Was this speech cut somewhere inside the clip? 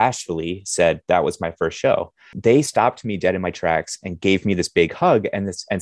yes; 1 cut; at 2.3 s

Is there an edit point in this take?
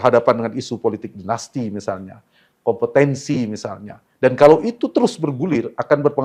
no; 0 cuts

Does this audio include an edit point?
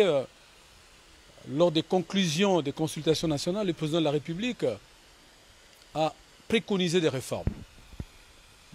no; 0 cuts

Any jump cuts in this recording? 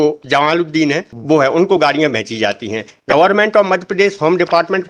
yes; 1 cut; at 1.1 s

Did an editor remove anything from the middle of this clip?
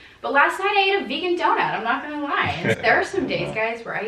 yes; 1 cut; at 2.8 s

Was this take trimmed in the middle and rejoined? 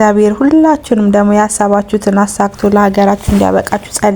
no; 0 cuts

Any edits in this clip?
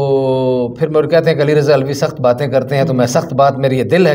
no; 0 cuts

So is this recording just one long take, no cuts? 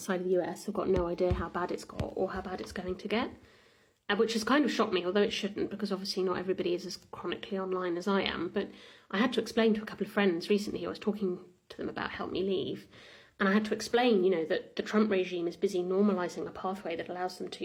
yes; 0 cuts

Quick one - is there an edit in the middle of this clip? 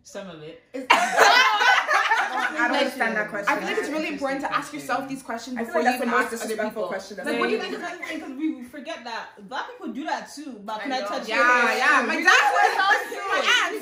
yes; 2 cuts; at 2.4 s, 7.8 s

